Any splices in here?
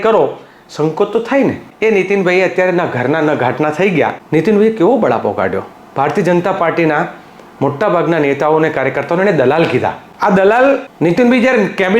yes; 4 cuts; at 1.7 s, 4.2 s, 10.1 s, 10.9 s

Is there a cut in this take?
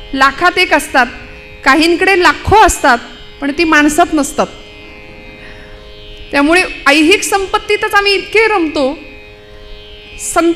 no; 0 cuts

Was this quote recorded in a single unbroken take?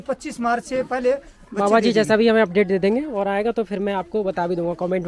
yes; 0 cuts

